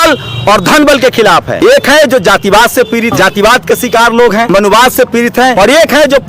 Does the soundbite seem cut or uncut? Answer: cut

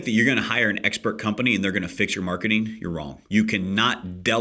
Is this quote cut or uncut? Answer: cut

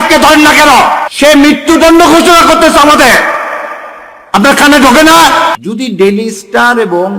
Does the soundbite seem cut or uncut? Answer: cut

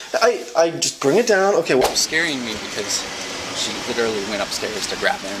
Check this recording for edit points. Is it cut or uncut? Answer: cut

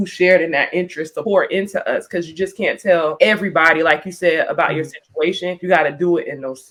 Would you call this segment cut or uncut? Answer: uncut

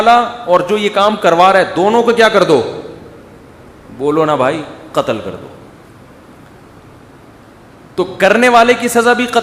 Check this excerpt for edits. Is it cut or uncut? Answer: uncut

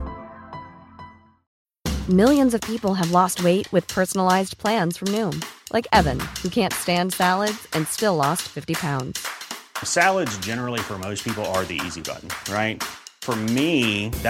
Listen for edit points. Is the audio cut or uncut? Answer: cut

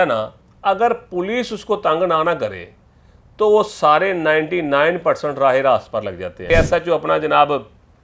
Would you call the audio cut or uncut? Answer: cut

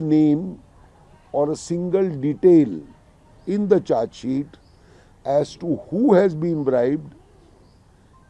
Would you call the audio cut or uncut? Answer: uncut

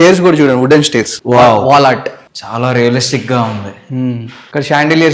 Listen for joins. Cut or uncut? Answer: cut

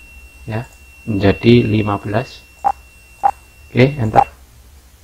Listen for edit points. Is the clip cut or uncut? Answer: uncut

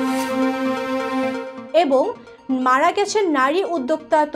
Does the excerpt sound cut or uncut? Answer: cut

